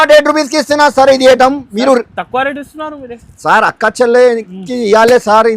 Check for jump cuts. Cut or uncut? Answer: uncut